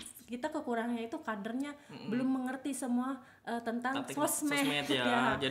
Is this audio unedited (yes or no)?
yes